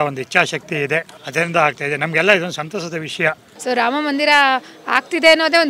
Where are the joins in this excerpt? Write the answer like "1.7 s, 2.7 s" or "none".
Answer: 1.2 s, 3.4 s